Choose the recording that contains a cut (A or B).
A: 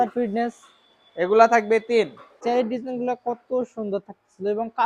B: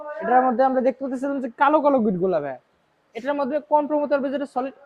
A